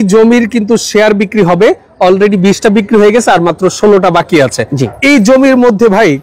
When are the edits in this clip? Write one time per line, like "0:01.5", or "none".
0:04.8